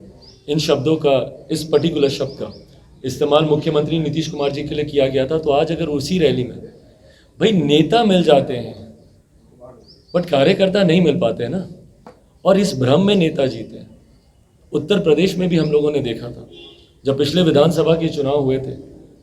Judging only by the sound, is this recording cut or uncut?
uncut